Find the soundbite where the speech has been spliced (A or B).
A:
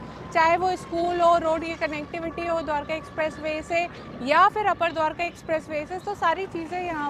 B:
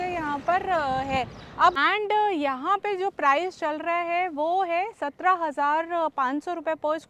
B